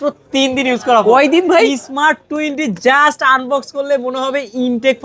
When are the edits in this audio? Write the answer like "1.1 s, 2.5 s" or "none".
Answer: none

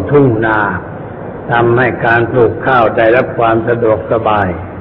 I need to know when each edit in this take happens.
1.9 s

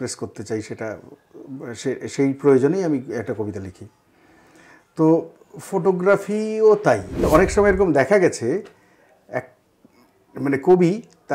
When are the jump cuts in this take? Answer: 7.2 s

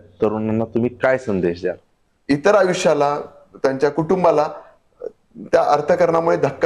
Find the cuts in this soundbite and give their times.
2.1 s

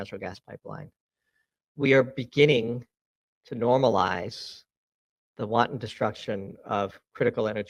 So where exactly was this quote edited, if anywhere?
none

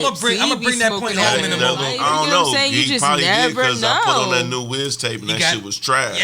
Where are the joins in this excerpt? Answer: 1.9 s

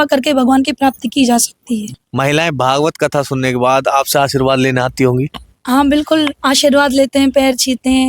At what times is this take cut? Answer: 1.9 s

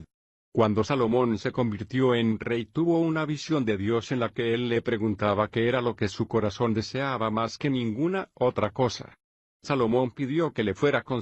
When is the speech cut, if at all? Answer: 2.4 s

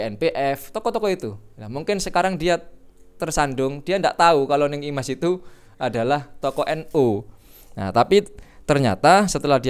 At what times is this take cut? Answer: none

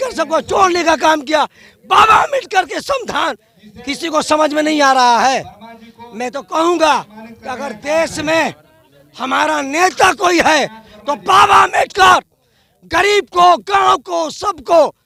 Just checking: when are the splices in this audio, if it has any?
none

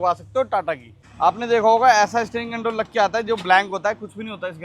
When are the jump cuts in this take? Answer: 1.0 s

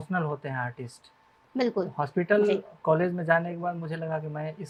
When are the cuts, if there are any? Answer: none

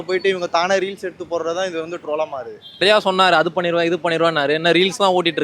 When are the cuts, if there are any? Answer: 2.8 s

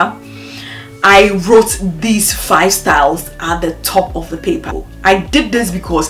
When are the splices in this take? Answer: 4.8 s

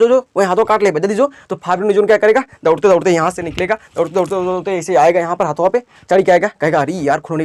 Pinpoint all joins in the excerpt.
none

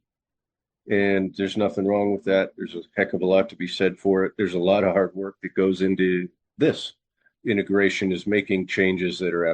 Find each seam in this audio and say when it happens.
6.4 s, 7.3 s

